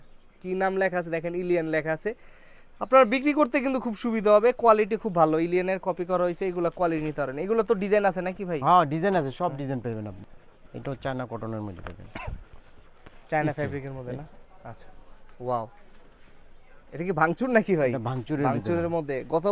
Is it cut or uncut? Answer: uncut